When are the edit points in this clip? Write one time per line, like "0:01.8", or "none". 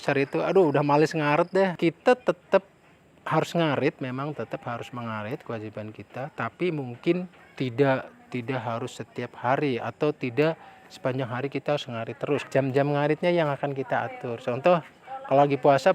0:01.7
0:07.4
0:12.4